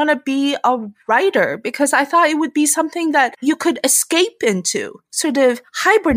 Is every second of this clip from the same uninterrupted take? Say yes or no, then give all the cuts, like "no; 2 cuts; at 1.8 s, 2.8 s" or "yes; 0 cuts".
no; 2 cuts; at 3.4 s, 4.9 s